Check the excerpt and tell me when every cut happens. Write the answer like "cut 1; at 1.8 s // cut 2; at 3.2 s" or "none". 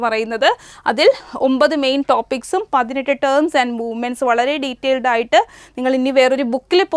none